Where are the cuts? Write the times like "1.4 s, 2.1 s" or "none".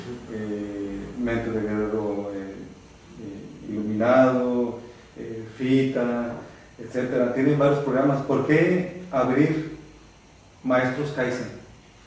11.1 s